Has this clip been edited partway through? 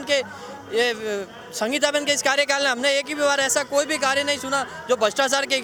no; 0 cuts

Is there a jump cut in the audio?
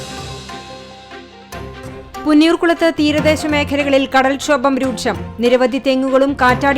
yes; 1 cut; at 1.9 s

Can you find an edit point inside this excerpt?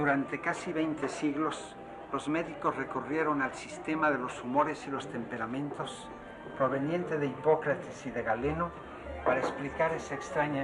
no; 0 cuts

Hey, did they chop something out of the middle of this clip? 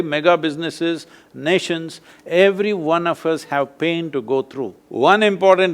yes; 1 cut; at 4.8 s

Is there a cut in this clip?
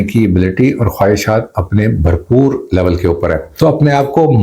yes; 1 cut; at 3.5 s

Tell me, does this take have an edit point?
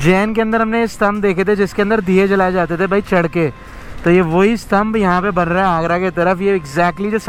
no; 0 cuts

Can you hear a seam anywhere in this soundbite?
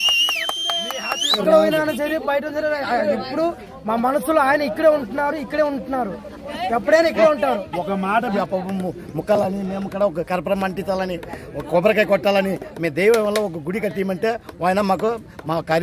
yes; 2 cuts; at 1.4 s, 8.3 s

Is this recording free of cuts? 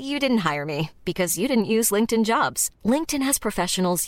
yes; 0 cuts

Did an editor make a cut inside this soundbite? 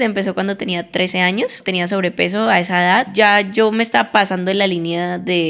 yes; 2 cuts; at 1.6 s, 3.1 s

